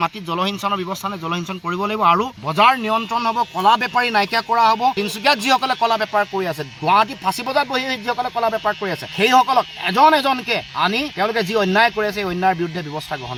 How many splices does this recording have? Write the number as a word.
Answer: zero